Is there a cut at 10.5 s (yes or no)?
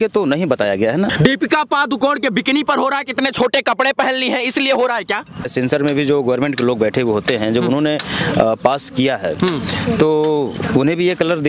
no